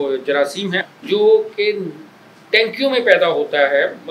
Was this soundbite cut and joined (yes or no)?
yes